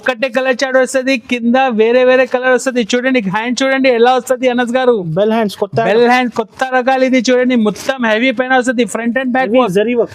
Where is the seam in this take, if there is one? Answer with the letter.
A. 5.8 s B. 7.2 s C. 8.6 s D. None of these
D